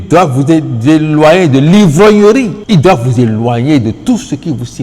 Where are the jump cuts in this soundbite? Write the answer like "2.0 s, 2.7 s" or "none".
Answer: 2.6 s